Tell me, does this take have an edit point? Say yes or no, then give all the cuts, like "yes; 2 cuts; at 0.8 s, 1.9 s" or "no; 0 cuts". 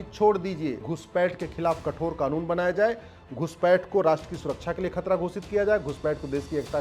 yes; 1 cut; at 0.9 s